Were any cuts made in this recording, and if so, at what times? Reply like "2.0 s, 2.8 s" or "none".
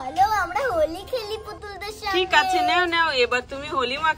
none